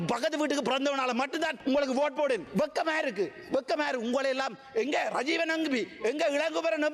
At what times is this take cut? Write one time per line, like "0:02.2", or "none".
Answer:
none

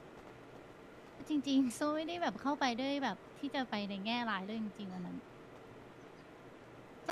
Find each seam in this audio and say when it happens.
0:00.9

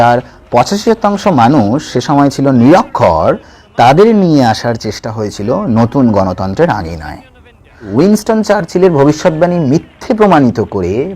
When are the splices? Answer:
0:07.9

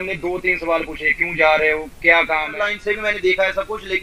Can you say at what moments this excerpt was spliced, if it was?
0:02.5

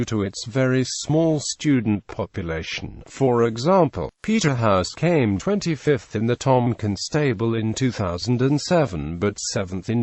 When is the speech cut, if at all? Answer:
0:03.1

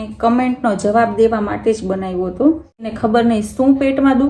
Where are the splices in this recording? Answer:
0:02.9

